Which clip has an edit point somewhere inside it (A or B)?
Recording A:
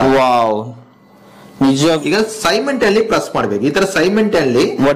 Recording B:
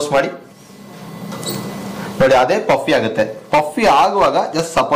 A